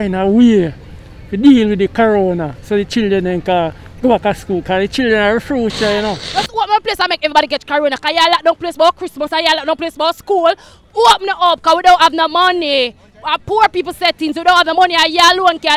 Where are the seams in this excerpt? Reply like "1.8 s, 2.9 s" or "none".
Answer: 6.2 s